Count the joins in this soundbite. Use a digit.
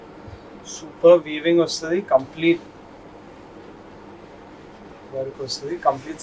0